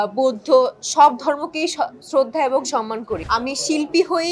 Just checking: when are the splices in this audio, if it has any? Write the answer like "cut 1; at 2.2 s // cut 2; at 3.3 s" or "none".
cut 1; at 3.2 s